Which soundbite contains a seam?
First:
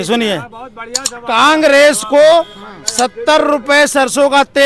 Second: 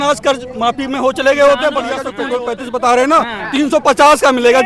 second; 1 cut; at 2.1 s

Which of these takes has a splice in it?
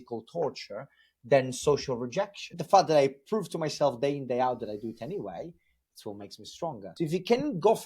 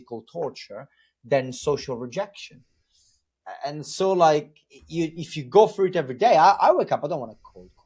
first; 2 cuts; at 2.5 s, 6.8 s

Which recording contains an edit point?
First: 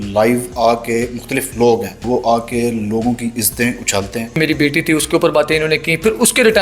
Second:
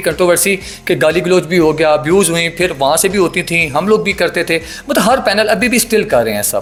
first; 2 cuts; at 2.0 s, 4.4 s

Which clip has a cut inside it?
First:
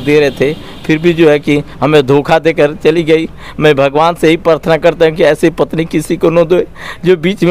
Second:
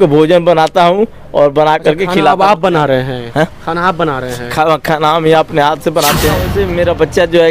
second; 1 cut; at 6.5 s

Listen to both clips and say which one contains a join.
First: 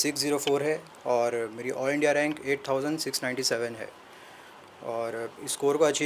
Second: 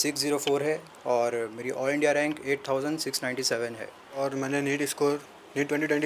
second; 1 cut; at 4.2 s

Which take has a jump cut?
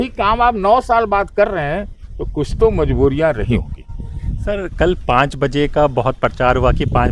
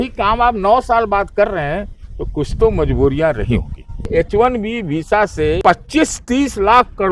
second; 2 cuts; at 4.1 s, 5.6 s

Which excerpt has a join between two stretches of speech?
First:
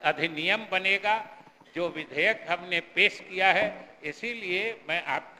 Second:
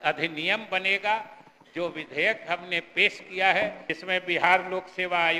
second; 1 cut; at 3.9 s

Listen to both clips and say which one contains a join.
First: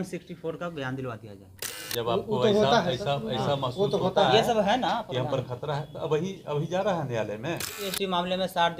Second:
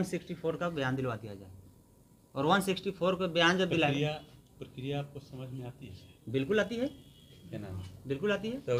first; 2 cuts; at 1.8 s, 7.9 s

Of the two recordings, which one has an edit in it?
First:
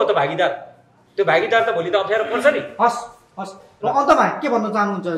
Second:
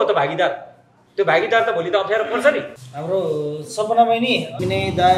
second; 1 cut; at 2.7 s

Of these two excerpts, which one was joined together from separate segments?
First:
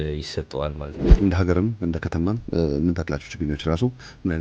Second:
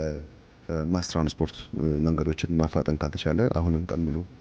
first; 1 cut; at 1.0 s

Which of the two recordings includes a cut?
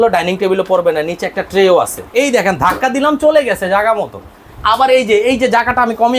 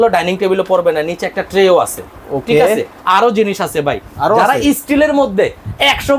first; 1 cut; at 2.1 s

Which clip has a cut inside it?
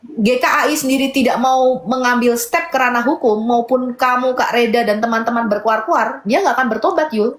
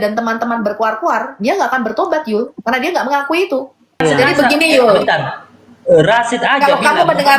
second; 1 cut; at 4.0 s

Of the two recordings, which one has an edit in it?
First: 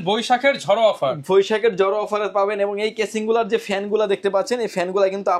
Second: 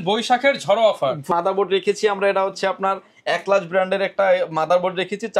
second; 1 cut; at 1.3 s

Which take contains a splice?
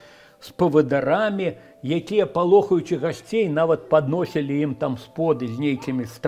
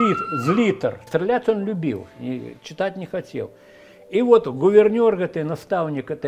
second; 1 cut; at 1.0 s

